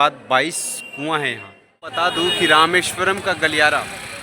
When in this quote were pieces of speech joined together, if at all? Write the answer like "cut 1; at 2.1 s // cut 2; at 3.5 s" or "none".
cut 1; at 1.9 s